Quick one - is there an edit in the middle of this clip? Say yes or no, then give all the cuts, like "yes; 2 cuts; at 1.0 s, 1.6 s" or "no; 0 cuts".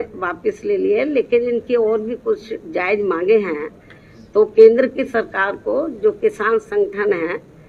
no; 0 cuts